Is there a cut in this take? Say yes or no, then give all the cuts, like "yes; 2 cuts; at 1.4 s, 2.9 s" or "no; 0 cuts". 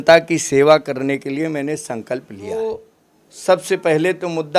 yes; 1 cut; at 2.5 s